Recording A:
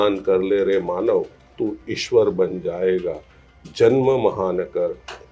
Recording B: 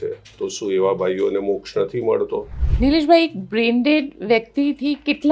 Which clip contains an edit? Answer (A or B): B